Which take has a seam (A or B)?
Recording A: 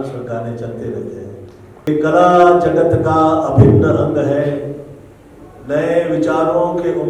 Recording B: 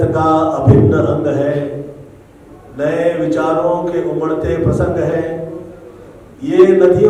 A